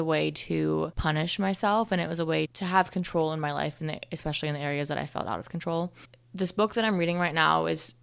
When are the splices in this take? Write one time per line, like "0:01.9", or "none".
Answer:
0:00.9
0:06.1